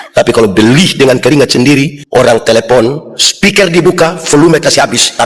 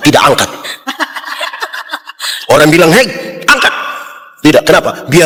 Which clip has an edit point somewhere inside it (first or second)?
first